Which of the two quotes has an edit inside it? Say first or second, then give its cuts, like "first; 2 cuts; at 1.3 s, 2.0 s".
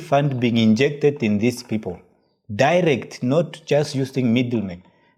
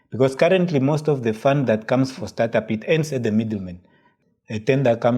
second; 1 cut; at 4.0 s